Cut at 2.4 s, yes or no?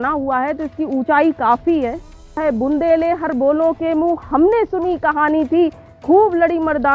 yes